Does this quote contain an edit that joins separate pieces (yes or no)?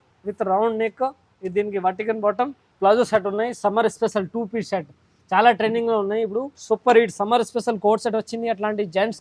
yes